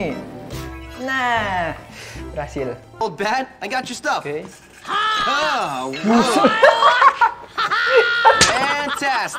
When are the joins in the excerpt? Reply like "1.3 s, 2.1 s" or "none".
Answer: 3.0 s